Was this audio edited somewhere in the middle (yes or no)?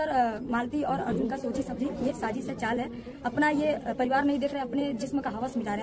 no